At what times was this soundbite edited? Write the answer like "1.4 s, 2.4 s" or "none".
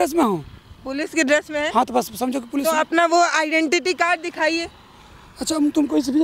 none